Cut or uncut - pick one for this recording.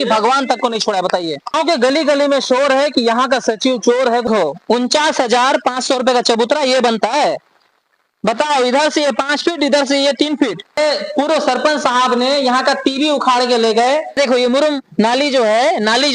cut